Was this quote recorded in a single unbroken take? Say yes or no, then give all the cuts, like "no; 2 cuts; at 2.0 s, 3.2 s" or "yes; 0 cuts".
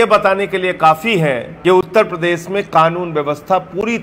no; 1 cut; at 1.5 s